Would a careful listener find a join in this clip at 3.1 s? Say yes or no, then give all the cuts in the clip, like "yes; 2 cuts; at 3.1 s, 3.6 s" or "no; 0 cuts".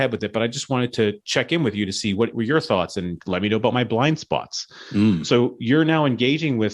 yes; 1 cut; at 3.1 s